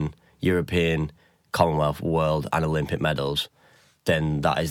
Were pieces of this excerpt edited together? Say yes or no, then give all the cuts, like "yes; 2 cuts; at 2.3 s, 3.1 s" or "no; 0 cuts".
no; 0 cuts